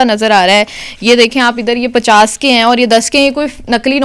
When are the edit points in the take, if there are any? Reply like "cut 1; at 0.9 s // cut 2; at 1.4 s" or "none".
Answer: none